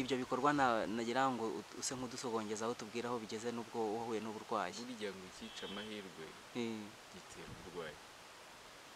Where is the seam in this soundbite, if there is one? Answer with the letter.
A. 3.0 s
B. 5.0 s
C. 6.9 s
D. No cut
D